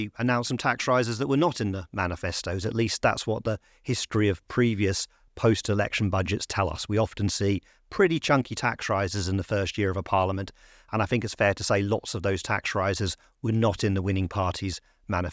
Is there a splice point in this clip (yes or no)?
no